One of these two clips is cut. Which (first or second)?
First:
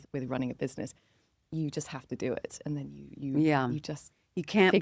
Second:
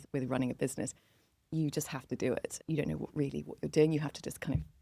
second